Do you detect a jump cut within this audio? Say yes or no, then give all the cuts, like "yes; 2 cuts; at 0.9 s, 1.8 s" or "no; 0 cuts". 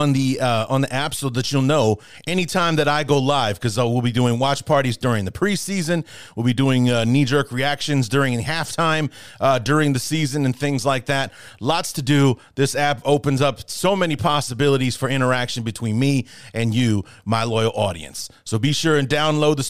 no; 0 cuts